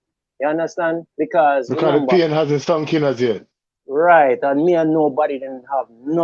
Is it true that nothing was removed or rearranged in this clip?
yes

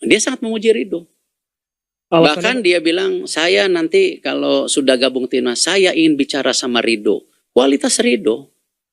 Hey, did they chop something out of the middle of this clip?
yes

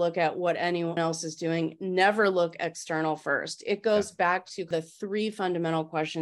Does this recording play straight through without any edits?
no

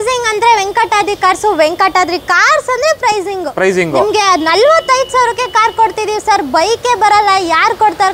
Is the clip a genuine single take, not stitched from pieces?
yes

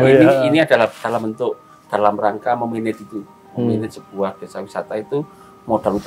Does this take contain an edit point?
no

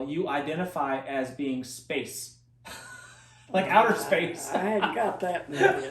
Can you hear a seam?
no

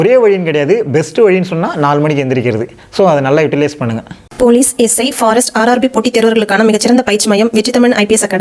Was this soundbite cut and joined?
no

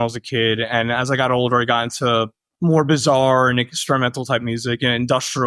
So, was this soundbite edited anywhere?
no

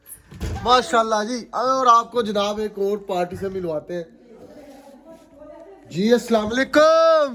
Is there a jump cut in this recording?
no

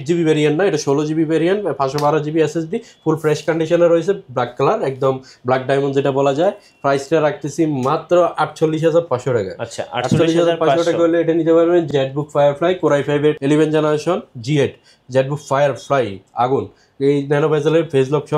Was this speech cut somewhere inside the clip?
no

